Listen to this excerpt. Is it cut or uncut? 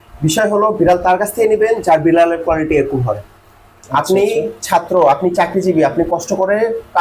uncut